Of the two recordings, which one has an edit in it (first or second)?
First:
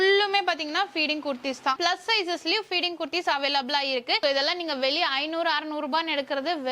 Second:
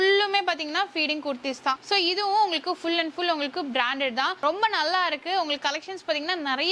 first